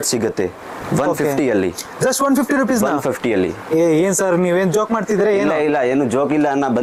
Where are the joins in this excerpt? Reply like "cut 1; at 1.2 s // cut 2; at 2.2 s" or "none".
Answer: none